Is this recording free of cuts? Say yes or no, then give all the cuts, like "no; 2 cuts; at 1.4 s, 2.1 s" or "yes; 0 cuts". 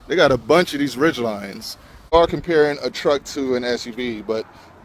no; 1 cut; at 2.1 s